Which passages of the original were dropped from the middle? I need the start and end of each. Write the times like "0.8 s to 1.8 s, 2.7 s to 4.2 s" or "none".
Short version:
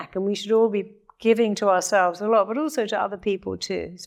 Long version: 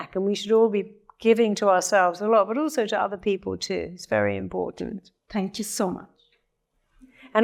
none